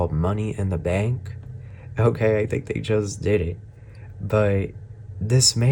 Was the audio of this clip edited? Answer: no; 0 cuts

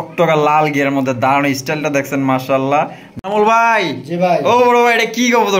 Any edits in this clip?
yes; 1 cut; at 3.1 s

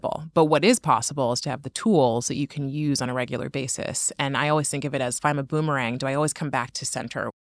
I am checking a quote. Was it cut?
no; 0 cuts

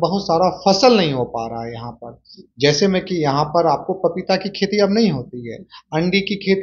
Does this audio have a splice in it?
no; 0 cuts

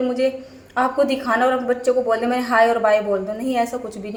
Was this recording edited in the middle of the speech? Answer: no; 0 cuts

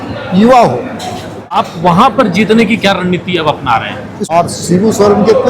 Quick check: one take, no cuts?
no; 2 cuts; at 1.6 s, 4.3 s

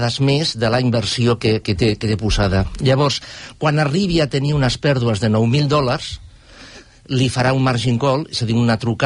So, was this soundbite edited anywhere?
no; 0 cuts

